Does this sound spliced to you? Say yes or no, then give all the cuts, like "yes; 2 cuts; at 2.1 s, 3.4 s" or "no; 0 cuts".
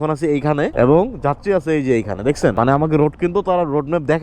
no; 0 cuts